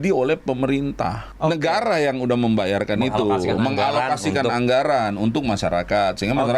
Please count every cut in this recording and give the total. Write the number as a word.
one